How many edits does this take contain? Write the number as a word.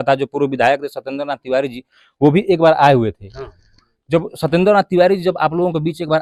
zero